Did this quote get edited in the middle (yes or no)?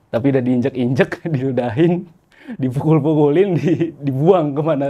no